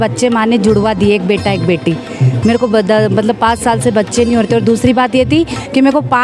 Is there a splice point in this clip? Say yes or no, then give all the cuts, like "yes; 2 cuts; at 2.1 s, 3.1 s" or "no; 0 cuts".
no; 0 cuts